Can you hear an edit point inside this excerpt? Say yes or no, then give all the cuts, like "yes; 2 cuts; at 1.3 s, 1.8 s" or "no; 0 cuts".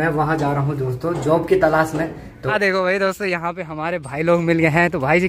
yes; 1 cut; at 2.4 s